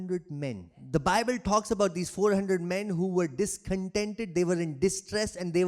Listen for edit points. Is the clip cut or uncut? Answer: cut